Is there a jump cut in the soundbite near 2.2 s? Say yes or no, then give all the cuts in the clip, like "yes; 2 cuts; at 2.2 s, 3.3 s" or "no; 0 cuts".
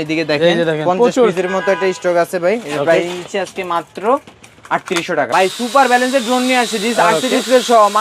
no; 1 cut; at 5.3 s